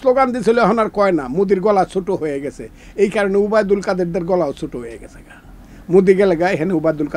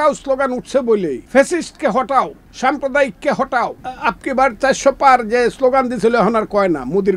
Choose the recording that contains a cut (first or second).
second